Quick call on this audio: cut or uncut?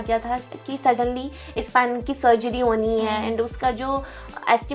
uncut